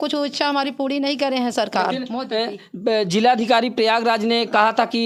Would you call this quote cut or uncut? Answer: uncut